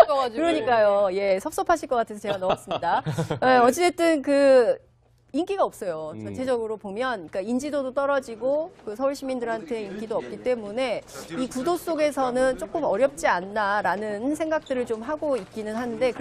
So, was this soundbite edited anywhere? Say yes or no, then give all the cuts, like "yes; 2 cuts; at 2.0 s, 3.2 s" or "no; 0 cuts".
no; 0 cuts